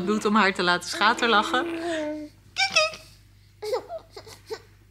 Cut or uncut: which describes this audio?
uncut